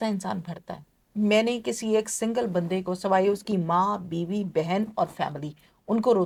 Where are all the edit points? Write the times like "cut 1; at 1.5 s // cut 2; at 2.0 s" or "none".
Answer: none